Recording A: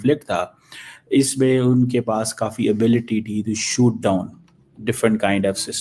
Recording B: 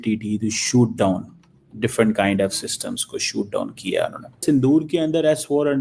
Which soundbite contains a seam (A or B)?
B